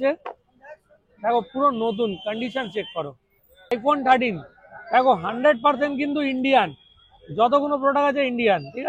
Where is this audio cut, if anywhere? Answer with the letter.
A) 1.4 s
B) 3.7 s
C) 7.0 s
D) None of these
B